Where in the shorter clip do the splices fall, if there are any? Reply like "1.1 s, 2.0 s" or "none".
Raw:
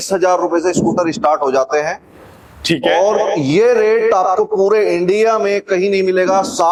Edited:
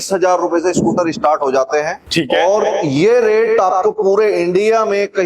2.0 s